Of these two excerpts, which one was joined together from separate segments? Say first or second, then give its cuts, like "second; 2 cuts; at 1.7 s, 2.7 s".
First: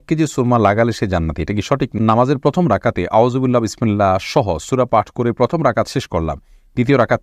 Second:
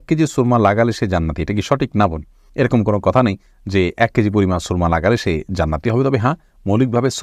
first; 1 cut; at 1.9 s